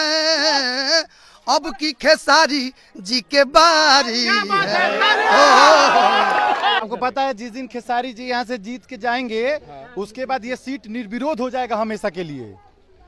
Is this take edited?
yes; 1 cut; at 6.8 s

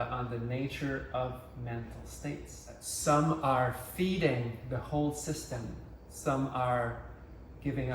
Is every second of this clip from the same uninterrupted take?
no; 1 cut; at 2.9 s

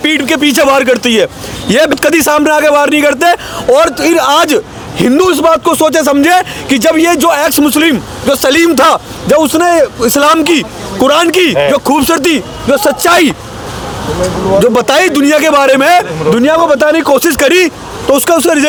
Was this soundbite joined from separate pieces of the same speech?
no; 0 cuts

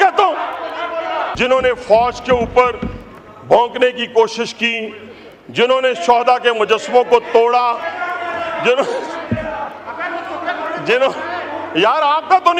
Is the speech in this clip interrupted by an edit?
yes; 1 cut; at 1.3 s

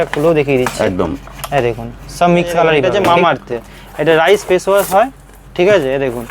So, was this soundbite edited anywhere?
yes; 1 cut; at 2.9 s

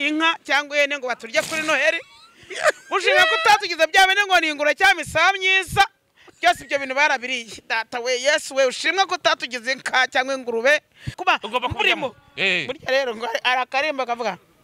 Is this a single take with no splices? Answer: no; 1 cut; at 11.2 s

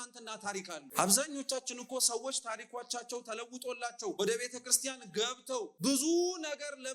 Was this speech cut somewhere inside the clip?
yes; 3 cuts; at 0.8 s, 4.2 s, 5.7 s

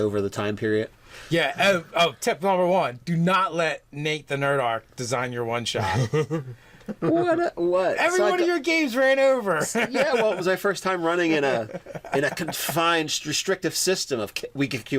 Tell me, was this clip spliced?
yes; 1 cut; at 4.2 s

